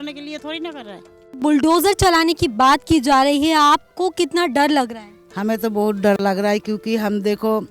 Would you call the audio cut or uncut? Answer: cut